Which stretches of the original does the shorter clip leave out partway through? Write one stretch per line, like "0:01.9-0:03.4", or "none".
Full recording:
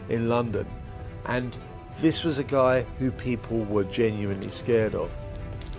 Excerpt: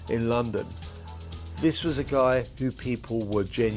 0:01.2-0:01.6